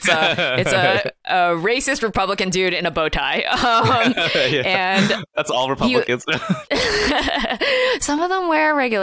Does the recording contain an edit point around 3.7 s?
no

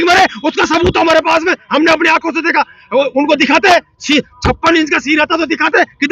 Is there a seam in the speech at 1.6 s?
no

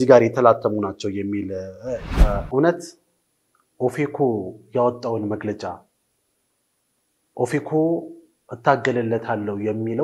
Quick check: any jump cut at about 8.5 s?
no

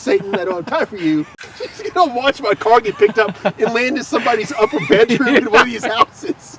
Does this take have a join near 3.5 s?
no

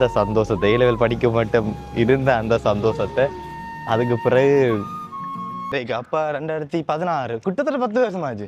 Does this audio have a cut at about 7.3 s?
no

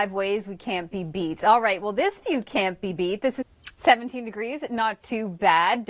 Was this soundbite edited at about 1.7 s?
no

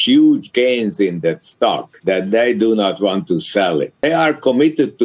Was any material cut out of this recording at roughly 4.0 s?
yes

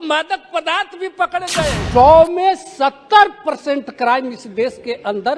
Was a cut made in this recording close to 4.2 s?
no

